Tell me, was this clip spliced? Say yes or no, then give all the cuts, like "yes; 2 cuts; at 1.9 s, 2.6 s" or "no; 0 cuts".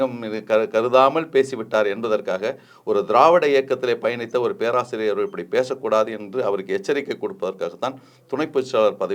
no; 0 cuts